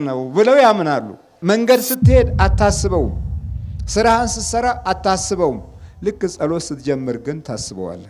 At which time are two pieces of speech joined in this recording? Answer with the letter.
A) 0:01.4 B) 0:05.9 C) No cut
A